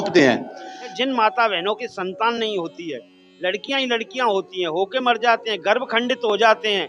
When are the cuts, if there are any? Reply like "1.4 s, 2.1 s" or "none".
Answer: 0.9 s